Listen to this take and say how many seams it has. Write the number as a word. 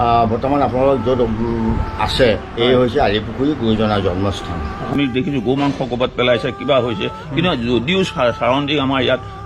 one